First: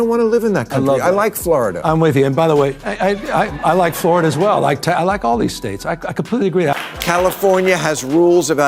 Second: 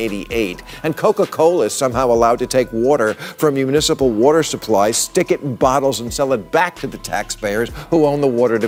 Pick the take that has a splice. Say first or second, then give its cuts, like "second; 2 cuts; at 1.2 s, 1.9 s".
first; 1 cut; at 6.7 s